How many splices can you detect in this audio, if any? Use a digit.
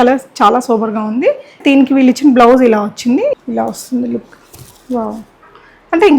2